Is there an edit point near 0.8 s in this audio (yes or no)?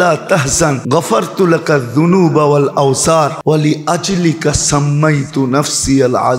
yes